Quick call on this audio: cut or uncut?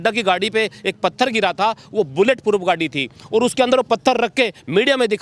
uncut